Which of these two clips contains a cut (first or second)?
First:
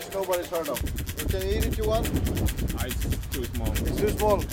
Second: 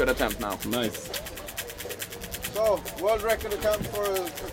first